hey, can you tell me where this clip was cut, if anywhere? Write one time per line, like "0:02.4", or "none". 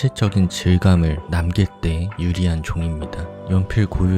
0:01.6